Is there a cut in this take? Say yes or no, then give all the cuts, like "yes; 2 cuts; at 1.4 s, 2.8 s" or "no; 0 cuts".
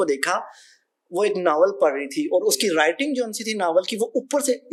no; 0 cuts